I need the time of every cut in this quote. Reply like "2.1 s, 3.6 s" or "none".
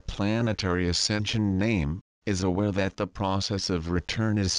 none